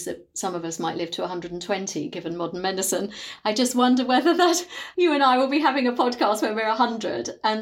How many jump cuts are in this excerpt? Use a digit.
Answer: 1